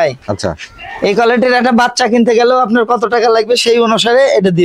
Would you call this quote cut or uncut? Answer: uncut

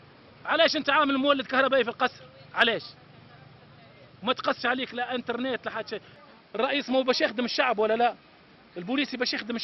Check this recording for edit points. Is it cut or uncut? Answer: cut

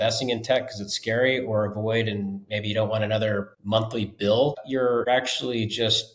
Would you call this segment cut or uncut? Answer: cut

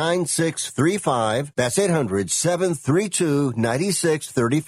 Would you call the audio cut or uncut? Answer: cut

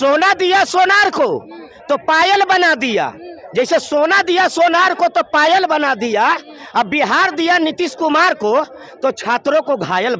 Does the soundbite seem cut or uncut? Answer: uncut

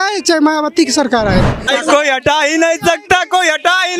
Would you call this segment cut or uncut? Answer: cut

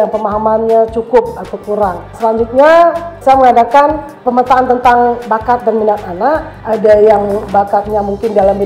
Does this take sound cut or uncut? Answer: cut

